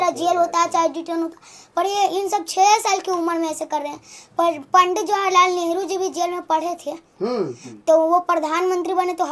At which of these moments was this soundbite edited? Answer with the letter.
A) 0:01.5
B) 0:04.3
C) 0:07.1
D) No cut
D